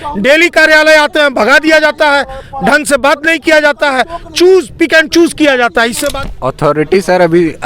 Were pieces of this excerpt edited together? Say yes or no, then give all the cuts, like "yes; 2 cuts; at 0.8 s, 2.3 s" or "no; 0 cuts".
yes; 1 cut; at 6.1 s